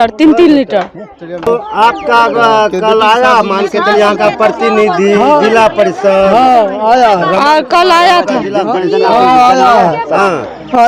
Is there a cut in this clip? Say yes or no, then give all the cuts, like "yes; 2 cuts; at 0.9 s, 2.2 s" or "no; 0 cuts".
no; 0 cuts